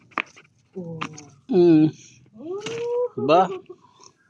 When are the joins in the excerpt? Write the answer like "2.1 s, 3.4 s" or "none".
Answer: none